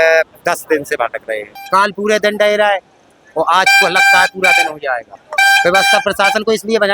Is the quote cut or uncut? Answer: cut